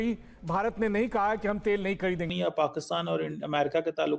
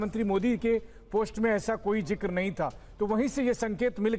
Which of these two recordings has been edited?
first; 1 cut; at 2.3 s

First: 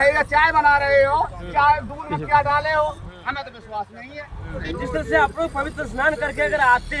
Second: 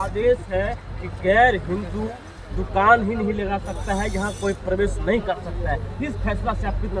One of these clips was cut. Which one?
first; 1 cut; at 4.6 s

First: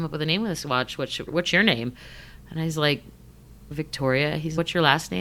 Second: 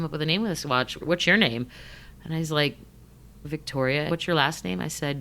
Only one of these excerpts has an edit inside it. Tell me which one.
second; 2 cuts; at 0.9 s, 4.1 s

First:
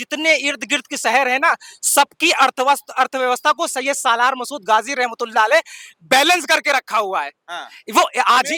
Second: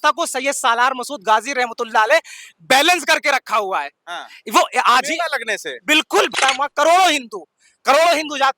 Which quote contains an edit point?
second; 1 cut; at 6.3 s

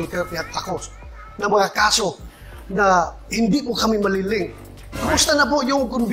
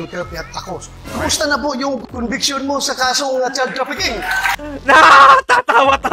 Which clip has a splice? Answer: second; 2 cuts; at 0.9 s, 2.0 s

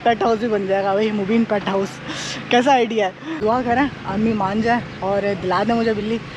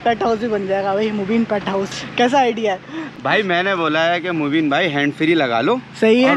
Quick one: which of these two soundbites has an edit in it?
second; 2 cuts; at 2.0 s, 3.0 s

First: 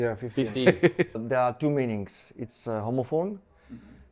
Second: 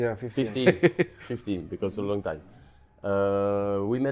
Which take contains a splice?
first; 1 cut; at 1.2 s

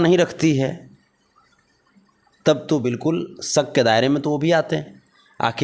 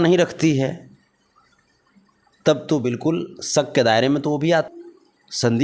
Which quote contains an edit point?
second; 1 cut; at 4.7 s

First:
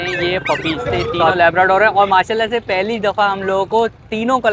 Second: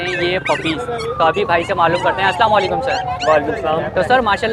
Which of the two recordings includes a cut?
first; 1 cut; at 1.3 s

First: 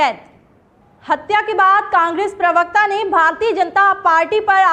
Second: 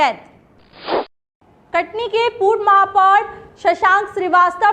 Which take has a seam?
second; 1 cut; at 0.9 s

